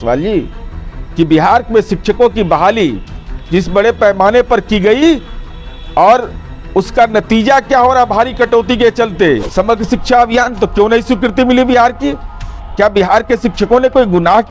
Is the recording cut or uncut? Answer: cut